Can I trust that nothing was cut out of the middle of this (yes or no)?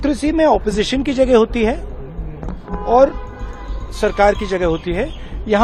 yes